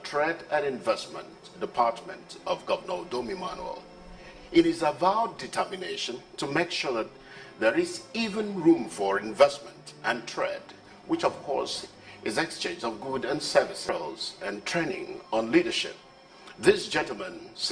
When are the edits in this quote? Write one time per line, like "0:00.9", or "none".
0:13.9